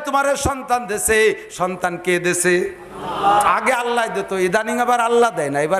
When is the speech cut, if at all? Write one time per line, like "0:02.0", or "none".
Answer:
0:03.5